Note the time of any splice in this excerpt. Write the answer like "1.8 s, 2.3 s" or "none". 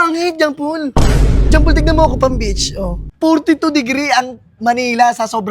3.0 s

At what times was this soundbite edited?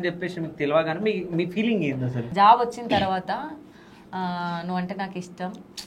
2.2 s

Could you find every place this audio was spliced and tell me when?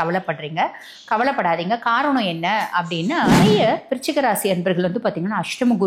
3.4 s

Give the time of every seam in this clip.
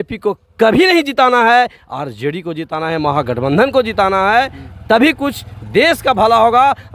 none

